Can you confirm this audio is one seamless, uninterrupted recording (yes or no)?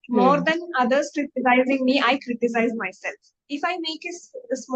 no